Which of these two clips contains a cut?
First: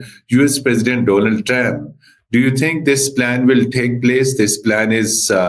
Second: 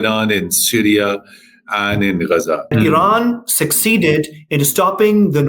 second; 1 cut; at 2.7 s

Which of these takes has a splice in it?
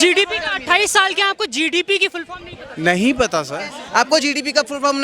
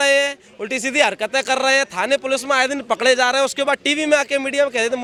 first; 1 cut; at 3.8 s

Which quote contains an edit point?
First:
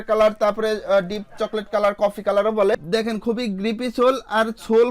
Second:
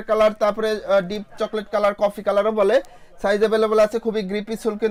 first; 1 cut; at 2.7 s

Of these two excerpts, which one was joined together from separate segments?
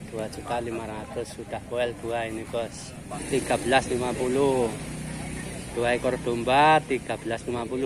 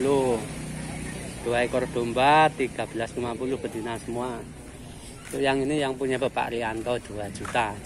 first; 1 cut; at 3.2 s

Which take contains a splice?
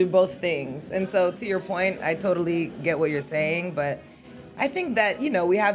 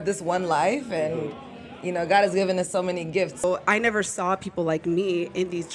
second; 1 cut; at 3.4 s

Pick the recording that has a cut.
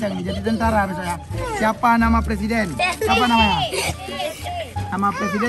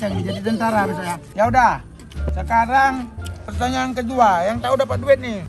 second; 1 cut; at 1.2 s

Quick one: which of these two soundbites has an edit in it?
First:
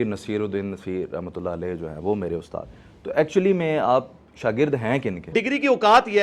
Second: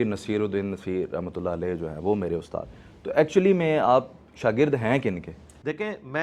first; 1 cut; at 5.3 s

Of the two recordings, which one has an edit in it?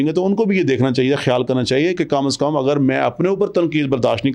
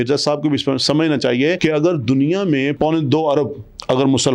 second; 2 cuts; at 1.6 s, 2.8 s

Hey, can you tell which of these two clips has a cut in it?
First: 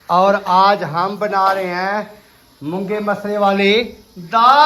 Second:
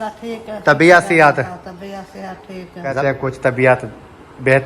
second; 1 cut; at 2.9 s

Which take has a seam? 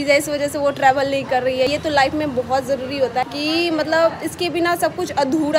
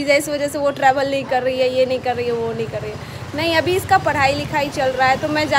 first; 2 cuts; at 1.7 s, 3.3 s

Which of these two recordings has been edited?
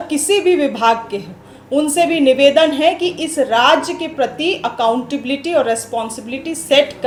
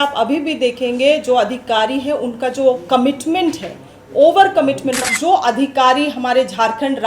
second; 1 cut; at 5.1 s

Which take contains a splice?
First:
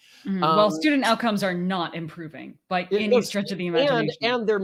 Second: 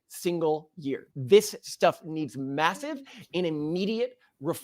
second; 1 cut; at 1.1 s

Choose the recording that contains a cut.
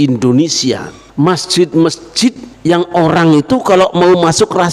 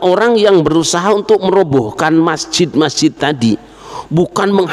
first; 2 cuts; at 1.0 s, 2.5 s

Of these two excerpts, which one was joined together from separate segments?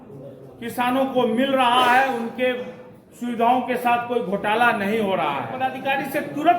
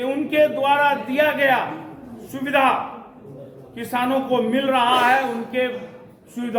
first; 1 cut; at 5.6 s

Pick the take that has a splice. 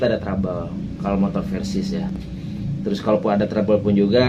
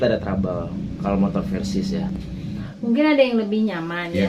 second; 1 cut; at 2.7 s

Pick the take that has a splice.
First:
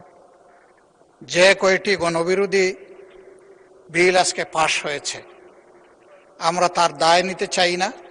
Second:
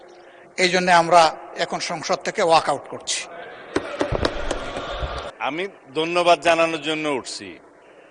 second; 1 cut; at 5.2 s

